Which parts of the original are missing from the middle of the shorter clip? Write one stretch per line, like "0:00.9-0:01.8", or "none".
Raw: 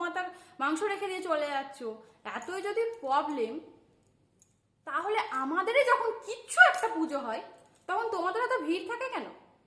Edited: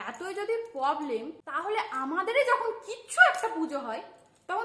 0:03.7-0:04.8